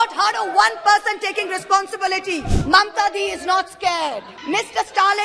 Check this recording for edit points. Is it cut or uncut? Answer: cut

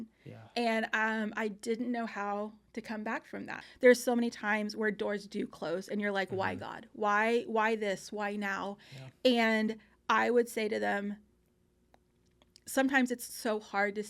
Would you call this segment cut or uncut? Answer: cut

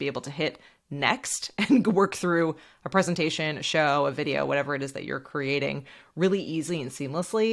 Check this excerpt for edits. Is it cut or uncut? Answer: uncut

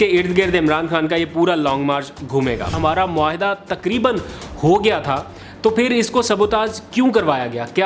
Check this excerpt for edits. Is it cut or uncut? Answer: cut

